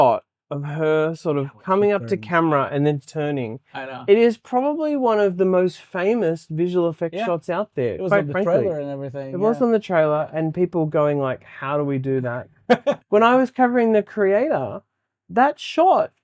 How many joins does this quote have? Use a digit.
1